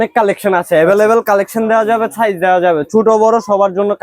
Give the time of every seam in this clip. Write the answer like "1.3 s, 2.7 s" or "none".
none